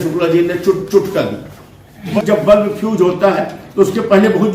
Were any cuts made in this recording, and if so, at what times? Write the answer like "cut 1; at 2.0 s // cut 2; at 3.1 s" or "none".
cut 1; at 2.2 s